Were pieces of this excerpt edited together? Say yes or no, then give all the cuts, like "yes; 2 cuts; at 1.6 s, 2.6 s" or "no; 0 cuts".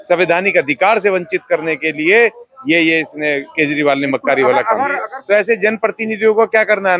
yes; 1 cut; at 5.1 s